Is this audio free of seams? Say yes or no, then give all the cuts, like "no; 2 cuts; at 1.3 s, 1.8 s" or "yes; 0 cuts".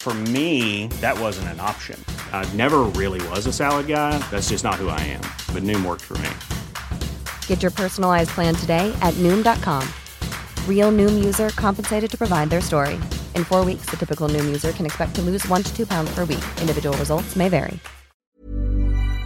no; 1 cut; at 18.2 s